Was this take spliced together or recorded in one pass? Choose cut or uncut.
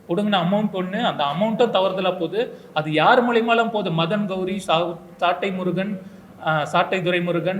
uncut